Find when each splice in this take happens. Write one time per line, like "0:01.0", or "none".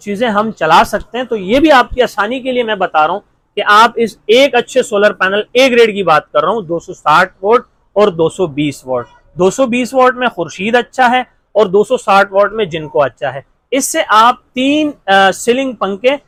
none